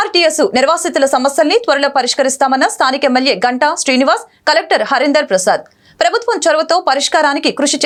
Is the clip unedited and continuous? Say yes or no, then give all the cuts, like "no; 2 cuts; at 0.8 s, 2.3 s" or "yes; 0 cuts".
yes; 0 cuts